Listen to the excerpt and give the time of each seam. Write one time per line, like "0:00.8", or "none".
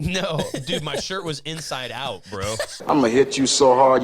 0:02.9